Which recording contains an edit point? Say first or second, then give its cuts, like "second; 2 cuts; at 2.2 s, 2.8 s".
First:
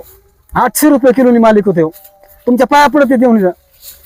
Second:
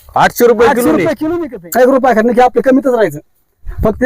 second; 1 cut; at 1.3 s